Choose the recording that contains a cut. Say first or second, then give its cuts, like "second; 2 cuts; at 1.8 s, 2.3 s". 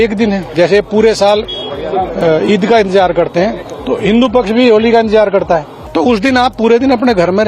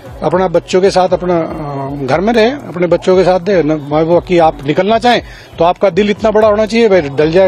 first; 1 cut; at 5.8 s